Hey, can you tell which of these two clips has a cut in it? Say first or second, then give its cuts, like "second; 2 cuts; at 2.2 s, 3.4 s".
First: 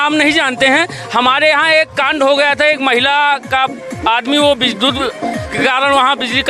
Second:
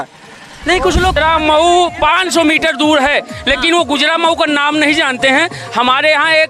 second; 1 cut; at 1.1 s